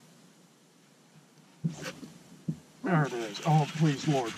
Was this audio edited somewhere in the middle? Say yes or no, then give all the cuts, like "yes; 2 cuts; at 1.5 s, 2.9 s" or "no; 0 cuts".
no; 0 cuts